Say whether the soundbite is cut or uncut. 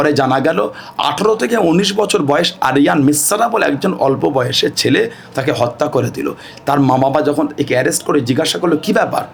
uncut